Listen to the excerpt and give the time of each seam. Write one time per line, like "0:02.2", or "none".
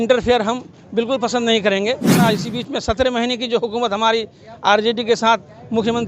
0:02.2

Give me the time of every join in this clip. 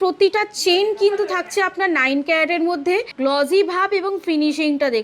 0:03.1

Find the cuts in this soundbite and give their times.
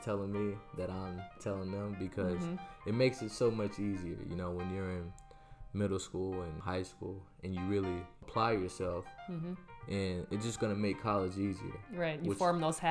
0:01.4
0:06.6
0:08.3

